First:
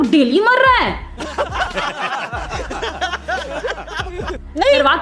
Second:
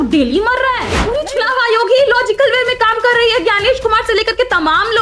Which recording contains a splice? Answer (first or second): second